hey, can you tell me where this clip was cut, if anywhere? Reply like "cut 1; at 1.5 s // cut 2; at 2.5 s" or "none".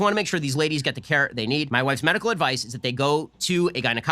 cut 1; at 1.7 s